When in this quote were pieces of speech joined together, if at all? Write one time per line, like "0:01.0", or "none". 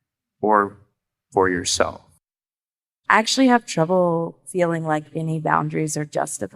0:02.8